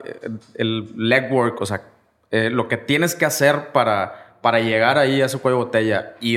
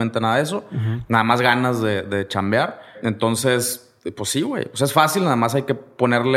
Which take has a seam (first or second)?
second